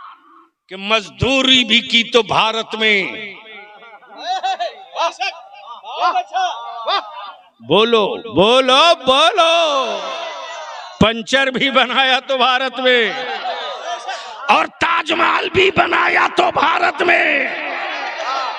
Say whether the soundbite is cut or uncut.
uncut